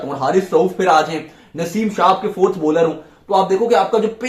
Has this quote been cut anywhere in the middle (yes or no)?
no